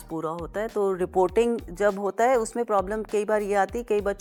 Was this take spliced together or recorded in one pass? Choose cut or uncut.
uncut